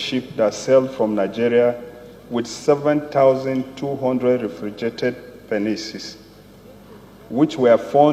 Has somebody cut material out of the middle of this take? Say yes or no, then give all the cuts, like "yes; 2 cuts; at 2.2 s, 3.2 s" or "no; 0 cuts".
no; 0 cuts